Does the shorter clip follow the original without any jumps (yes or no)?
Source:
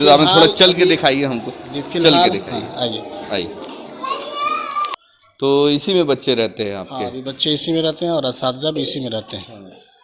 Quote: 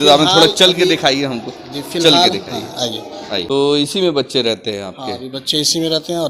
no